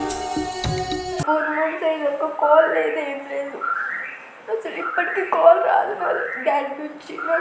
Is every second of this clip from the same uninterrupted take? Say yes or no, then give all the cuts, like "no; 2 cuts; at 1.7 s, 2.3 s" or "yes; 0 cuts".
no; 1 cut; at 1.2 s